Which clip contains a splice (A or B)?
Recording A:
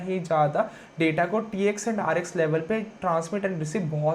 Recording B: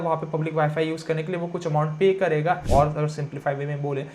B